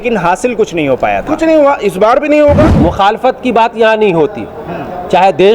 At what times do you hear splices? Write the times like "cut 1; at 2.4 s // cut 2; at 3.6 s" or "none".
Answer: cut 1; at 2.7 s